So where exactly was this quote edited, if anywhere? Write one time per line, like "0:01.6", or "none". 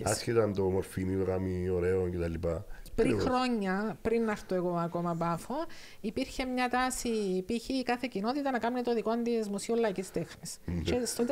0:02.8